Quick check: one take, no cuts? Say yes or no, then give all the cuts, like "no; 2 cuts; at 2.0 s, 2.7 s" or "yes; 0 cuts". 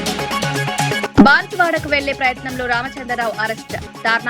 no; 1 cut; at 1.1 s